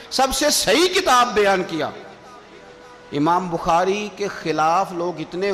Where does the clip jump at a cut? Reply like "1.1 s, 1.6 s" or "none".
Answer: none